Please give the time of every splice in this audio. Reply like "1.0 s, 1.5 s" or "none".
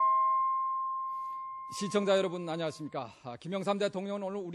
1.0 s